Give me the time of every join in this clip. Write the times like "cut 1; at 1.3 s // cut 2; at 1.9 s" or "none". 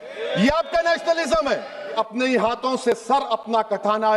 cut 1; at 2.0 s